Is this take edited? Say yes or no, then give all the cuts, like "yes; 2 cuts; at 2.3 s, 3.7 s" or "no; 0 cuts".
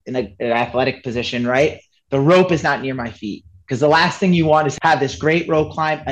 yes; 1 cut; at 4.7 s